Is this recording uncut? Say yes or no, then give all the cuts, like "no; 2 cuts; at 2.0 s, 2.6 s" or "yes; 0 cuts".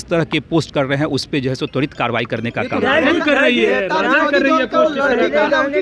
yes; 0 cuts